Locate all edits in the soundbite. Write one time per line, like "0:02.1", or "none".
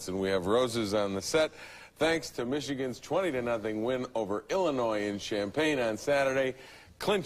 0:01.2

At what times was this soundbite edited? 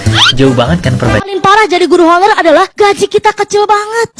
0:01.3

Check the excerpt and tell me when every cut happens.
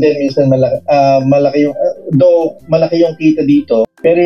none

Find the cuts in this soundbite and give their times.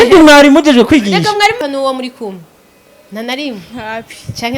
0:01.6

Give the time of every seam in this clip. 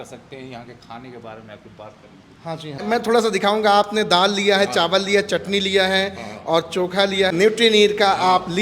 0:02.8
0:07.3

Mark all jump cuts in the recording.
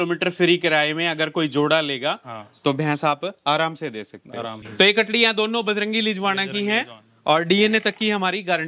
0:04.6

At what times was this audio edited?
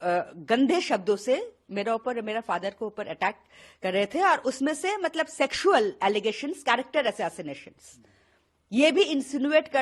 none

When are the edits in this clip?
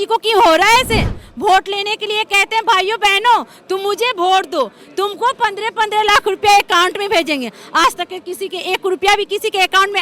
0:01.2

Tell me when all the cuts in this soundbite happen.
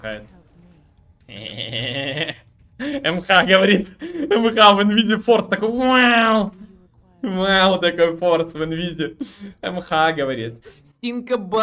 none

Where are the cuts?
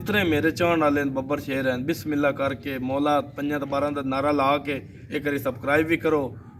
none

